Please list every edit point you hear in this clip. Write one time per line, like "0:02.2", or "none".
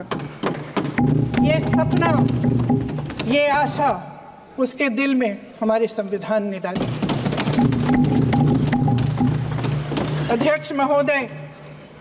none

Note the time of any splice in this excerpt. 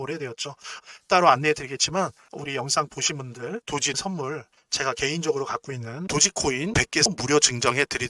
0:02.3
0:03.9

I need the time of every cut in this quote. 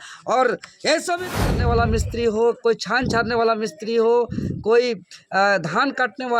0:01.5

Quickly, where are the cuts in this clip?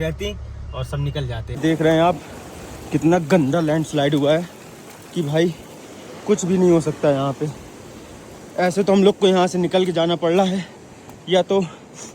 0:01.6

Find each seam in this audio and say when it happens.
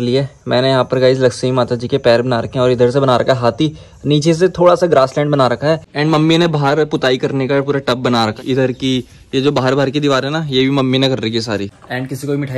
0:05.9
0:08.4
0:11.7

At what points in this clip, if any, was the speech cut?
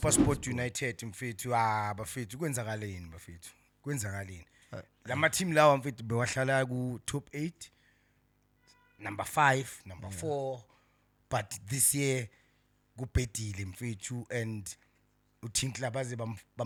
none

